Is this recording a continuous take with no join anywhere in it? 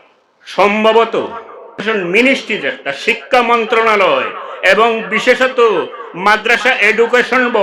no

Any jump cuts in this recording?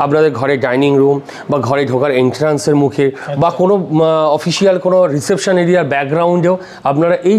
no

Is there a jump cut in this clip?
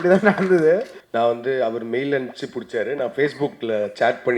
yes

